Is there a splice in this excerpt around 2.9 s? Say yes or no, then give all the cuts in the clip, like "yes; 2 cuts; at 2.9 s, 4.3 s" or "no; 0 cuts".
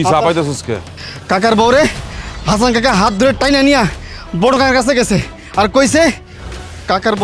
no; 1 cut; at 0.9 s